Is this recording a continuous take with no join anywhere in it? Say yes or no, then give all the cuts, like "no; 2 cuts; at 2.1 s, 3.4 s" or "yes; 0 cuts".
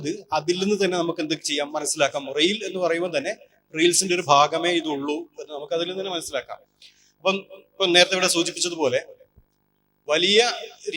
yes; 0 cuts